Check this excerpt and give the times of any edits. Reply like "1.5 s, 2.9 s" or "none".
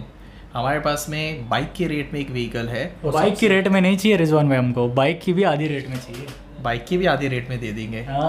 3.1 s